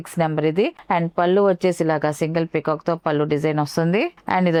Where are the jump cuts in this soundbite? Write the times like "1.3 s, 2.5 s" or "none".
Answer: none